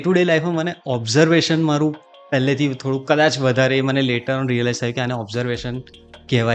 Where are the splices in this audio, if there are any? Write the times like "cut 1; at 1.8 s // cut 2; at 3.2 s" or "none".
none